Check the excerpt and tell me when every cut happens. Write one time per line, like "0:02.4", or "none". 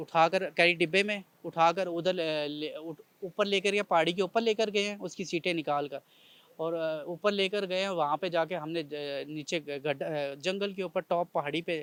none